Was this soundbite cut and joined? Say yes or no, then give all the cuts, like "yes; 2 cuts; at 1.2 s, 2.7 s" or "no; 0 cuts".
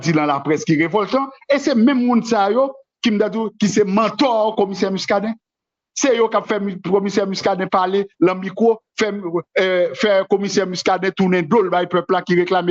no; 0 cuts